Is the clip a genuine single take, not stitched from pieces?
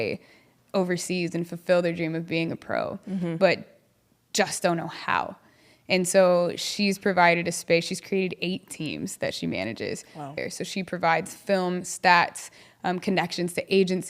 no; 1 cut; at 10.3 s

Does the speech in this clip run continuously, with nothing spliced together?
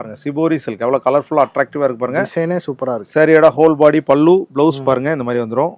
yes; 0 cuts

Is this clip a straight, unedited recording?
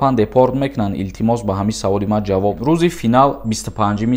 no; 1 cut; at 2.6 s

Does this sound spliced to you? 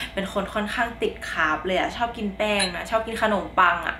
no; 0 cuts

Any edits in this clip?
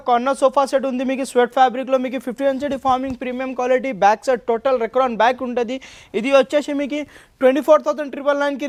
no; 0 cuts

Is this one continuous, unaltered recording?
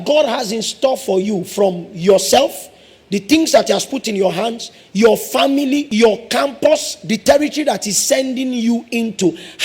no; 1 cut; at 5.9 s

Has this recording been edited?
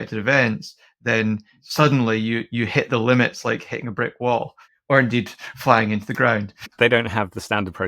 yes; 1 cut; at 1.6 s

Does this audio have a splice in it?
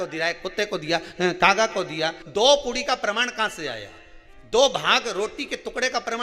yes; 1 cut; at 2.2 s

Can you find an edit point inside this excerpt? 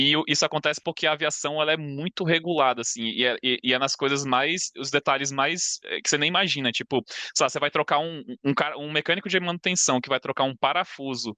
no; 0 cuts

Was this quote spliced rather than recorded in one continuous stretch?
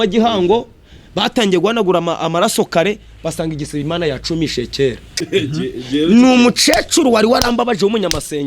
yes; 1 cut; at 5.1 s

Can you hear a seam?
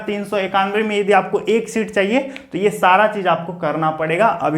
no; 0 cuts

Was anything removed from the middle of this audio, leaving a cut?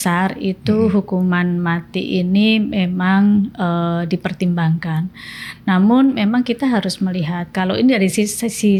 no; 0 cuts

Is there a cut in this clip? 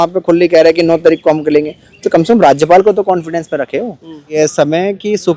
yes; 1 cut; at 4.3 s

